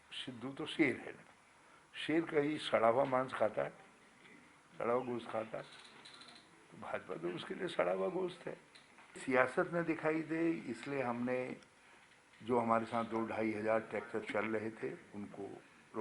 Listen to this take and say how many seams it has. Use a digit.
1